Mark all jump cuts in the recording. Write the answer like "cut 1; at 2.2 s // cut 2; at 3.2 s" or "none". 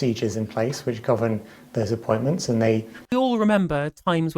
cut 1; at 3.0 s